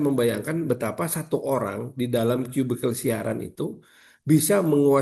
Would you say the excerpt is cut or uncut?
uncut